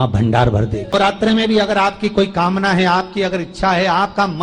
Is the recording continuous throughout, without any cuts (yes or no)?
no